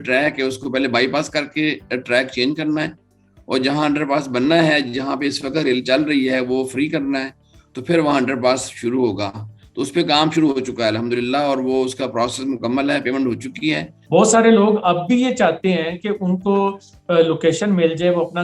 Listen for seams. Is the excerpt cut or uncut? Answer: cut